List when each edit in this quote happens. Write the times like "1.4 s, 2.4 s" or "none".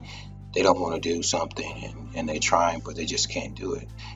none